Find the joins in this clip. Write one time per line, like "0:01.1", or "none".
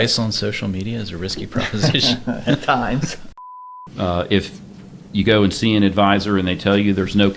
0:03.5